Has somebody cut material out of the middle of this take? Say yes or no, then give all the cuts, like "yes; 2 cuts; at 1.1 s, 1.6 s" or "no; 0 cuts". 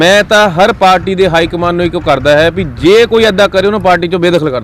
no; 0 cuts